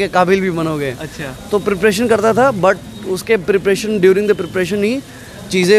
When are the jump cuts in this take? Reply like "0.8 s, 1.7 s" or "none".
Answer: none